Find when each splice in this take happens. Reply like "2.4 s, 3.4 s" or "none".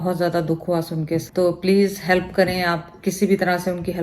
1.3 s